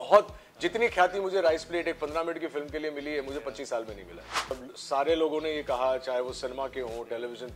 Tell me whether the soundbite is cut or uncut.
cut